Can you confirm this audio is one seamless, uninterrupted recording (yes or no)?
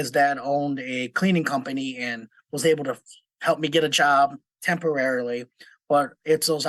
yes